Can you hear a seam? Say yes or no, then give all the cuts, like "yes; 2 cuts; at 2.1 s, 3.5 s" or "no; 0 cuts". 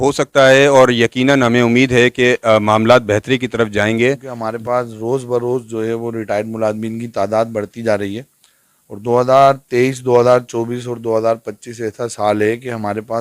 yes; 1 cut; at 4.3 s